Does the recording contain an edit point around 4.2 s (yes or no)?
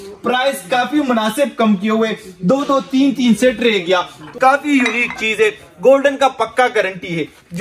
yes